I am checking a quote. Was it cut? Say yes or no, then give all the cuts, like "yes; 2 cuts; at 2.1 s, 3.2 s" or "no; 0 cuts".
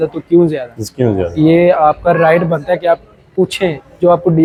no; 0 cuts